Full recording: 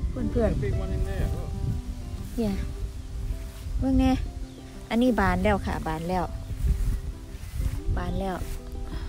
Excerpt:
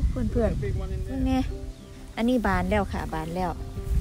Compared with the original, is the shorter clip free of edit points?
no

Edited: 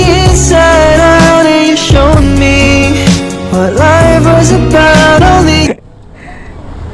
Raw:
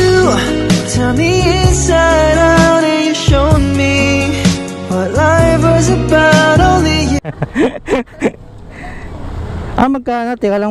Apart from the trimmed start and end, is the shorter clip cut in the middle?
yes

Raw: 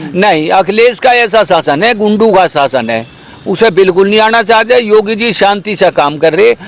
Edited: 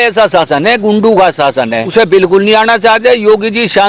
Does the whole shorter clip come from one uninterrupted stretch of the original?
no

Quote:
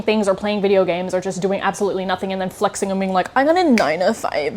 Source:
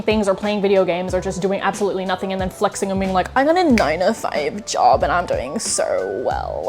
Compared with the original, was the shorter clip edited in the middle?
no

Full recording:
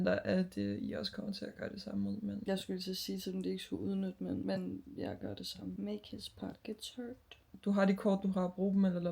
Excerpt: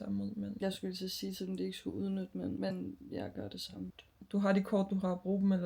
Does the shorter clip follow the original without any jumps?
no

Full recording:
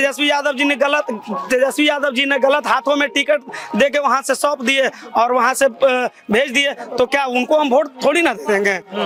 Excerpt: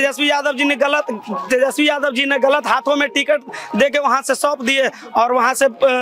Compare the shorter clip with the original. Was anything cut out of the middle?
no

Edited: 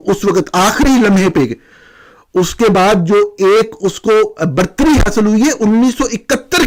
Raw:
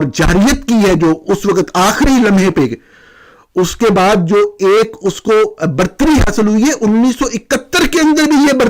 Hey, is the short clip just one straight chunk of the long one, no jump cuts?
yes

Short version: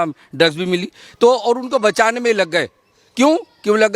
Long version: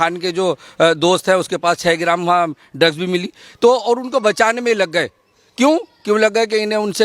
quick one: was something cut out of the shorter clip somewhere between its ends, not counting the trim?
no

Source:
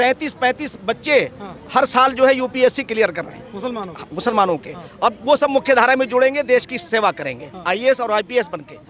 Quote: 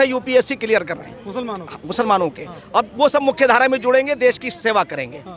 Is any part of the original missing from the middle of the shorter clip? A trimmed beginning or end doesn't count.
no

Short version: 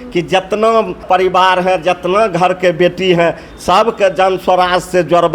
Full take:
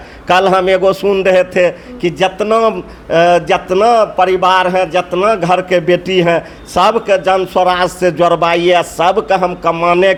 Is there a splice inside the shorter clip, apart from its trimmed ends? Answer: yes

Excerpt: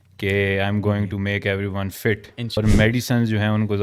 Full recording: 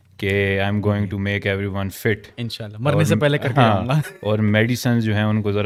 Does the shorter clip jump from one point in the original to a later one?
yes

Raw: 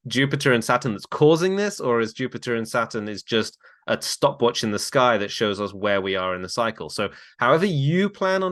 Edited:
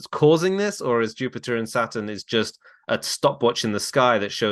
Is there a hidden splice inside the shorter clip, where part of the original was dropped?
no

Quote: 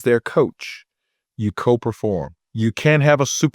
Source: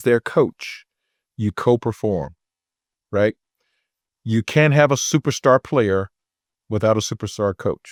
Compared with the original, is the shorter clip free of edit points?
no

